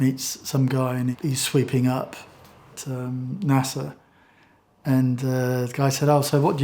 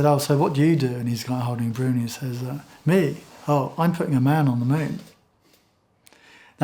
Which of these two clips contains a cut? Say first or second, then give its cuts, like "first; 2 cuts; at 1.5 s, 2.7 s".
first; 1 cut; at 1.1 s